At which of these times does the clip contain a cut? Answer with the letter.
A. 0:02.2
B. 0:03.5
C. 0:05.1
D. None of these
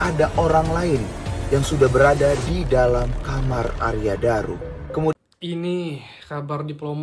C